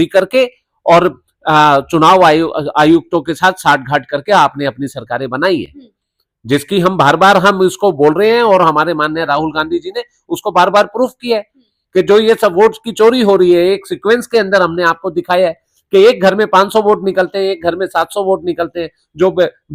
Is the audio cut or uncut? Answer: uncut